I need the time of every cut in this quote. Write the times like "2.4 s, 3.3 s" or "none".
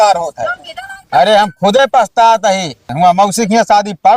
2.9 s